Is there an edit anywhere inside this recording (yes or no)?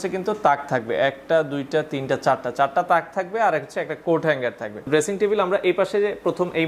yes